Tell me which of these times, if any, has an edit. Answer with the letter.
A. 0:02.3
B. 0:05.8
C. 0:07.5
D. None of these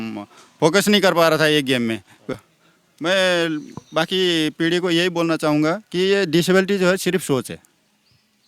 A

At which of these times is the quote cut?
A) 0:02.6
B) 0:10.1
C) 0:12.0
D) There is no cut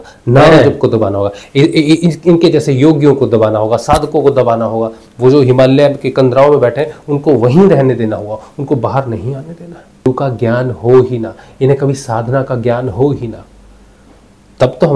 B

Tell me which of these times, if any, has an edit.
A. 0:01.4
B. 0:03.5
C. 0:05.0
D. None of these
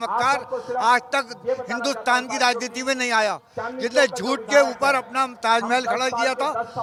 D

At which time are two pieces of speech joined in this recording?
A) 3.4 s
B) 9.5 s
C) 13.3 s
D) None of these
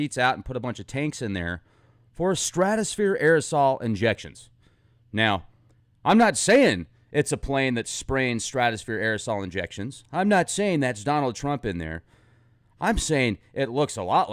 A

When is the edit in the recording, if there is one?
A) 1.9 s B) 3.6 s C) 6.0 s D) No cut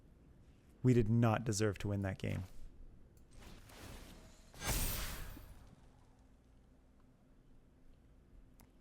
B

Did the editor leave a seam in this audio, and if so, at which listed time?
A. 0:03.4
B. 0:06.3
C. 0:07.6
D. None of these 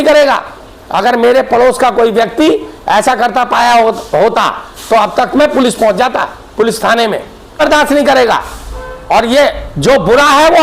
C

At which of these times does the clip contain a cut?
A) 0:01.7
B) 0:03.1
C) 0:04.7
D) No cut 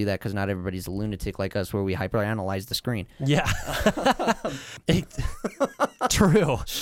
C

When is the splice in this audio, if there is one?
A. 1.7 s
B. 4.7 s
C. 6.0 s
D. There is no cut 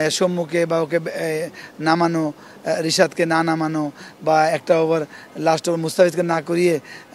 D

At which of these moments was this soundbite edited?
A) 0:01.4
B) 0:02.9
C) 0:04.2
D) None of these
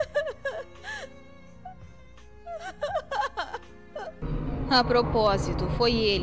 C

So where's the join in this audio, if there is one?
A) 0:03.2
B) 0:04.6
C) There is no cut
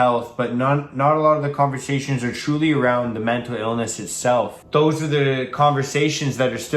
B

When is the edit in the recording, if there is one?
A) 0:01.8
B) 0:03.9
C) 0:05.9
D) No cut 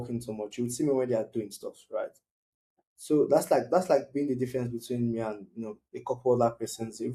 D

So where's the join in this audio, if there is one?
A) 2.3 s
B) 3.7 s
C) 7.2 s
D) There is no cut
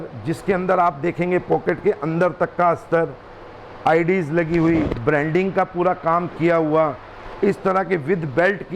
D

